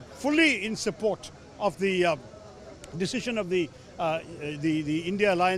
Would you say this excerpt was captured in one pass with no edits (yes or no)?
yes